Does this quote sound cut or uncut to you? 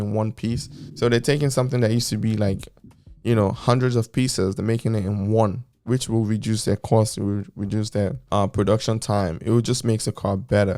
uncut